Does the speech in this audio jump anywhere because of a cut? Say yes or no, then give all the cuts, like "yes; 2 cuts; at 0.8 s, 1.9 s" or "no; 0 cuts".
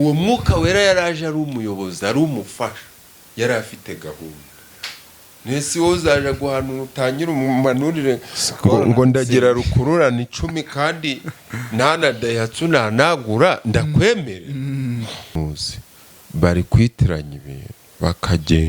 yes; 1 cut; at 15.4 s